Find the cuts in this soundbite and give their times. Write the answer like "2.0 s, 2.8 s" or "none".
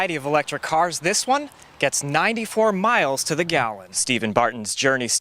3.9 s